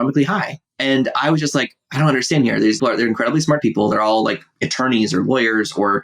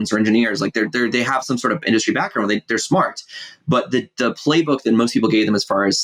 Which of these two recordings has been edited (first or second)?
first